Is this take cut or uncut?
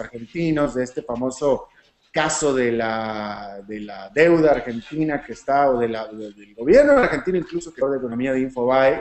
uncut